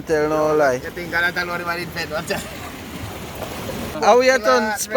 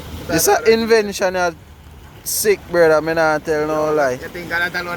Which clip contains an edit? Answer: first; 1 cut; at 3.9 s

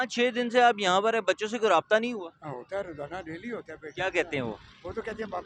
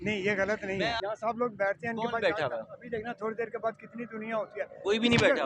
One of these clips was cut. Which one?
second; 1 cut; at 1.0 s

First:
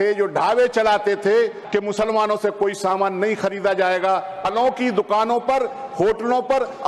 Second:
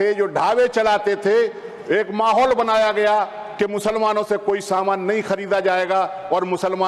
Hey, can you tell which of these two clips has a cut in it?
first; 2 cuts; at 1.6 s, 4.4 s

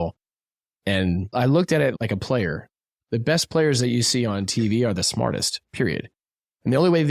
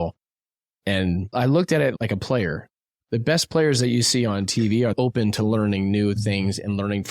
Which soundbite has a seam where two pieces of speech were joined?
second; 1 cut; at 4.9 s

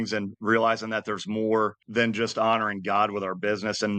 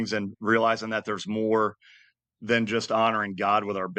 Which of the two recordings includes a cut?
first; 1 cut; at 1.8 s

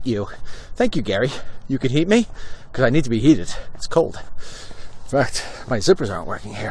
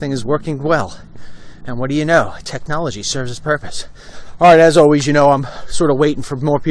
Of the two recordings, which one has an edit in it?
second; 1 cut; at 2.8 s

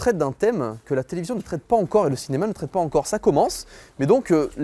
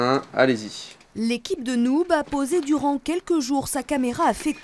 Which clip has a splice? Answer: second; 1 cut; at 2.1 s

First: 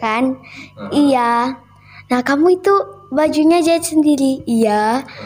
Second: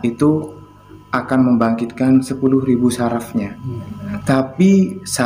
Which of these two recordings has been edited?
second; 1 cut; at 3.7 s

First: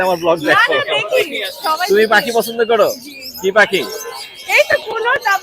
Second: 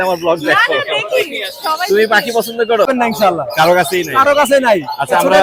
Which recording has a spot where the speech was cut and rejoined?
second; 1 cut; at 2.9 s

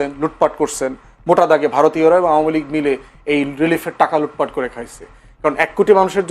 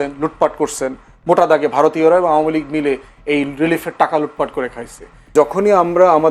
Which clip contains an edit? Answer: second; 1 cut; at 5.3 s

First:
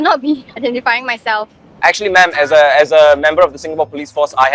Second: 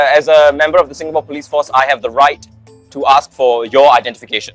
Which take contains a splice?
first; 1 cut; at 1.6 s

